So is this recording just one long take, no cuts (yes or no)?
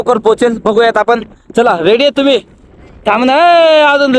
yes